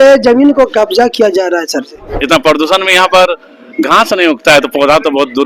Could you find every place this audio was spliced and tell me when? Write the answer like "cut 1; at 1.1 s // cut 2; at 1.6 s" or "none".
cut 1; at 2.1 s

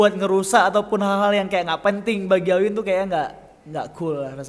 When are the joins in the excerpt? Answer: none

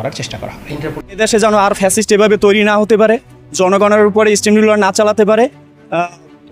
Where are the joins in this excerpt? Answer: cut 1; at 1.1 s

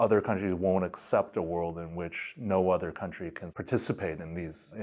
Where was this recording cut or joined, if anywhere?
none

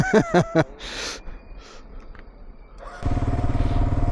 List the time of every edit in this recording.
cut 1; at 3.0 s

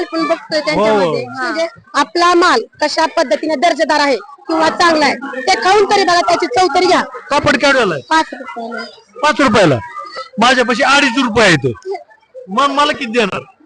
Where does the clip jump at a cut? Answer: cut 1; at 1.5 s // cut 2; at 7.2 s

